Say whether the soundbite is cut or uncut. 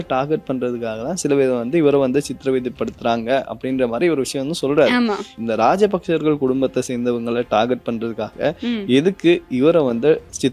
uncut